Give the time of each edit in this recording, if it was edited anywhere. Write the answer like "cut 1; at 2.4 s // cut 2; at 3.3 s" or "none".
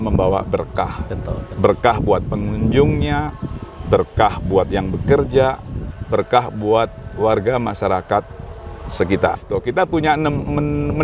cut 1; at 9.4 s